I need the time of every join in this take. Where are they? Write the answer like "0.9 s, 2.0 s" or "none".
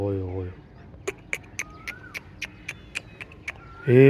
none